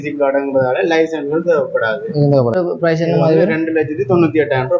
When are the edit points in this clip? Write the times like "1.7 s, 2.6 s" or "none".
2.5 s